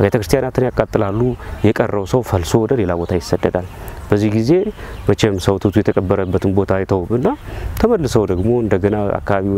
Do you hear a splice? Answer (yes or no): no